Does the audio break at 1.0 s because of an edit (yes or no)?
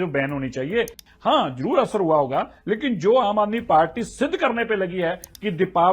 yes